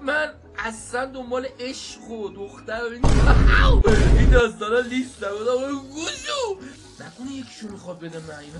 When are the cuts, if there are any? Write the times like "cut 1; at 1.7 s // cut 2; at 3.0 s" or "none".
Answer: cut 1; at 6.7 s